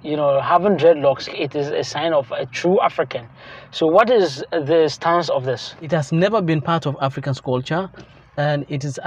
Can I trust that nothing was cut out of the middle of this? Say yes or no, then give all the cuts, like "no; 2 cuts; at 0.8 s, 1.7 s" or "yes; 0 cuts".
no; 2 cuts; at 1.3 s, 5.8 s